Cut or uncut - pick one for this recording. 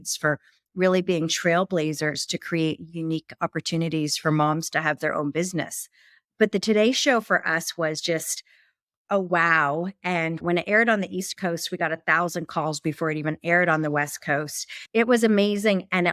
cut